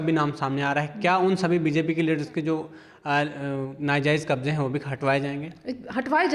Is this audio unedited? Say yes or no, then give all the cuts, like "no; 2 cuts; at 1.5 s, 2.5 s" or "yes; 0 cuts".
yes; 0 cuts